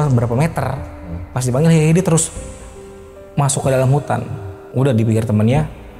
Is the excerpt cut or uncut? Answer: cut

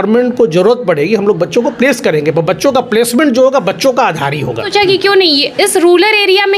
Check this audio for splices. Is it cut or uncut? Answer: cut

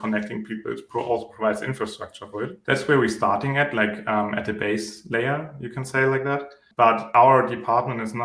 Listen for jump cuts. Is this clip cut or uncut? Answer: cut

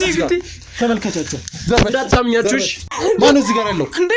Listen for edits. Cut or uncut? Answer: cut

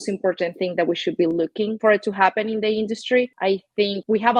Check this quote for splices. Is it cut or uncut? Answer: cut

